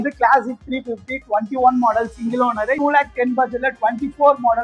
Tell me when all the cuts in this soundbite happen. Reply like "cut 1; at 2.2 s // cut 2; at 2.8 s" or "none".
cut 1; at 2.8 s